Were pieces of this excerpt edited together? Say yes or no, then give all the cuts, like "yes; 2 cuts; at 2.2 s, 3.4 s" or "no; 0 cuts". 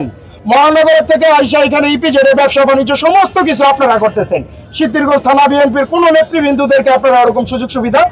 no; 0 cuts